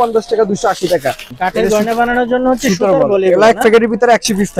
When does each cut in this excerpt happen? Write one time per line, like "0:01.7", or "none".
0:01.4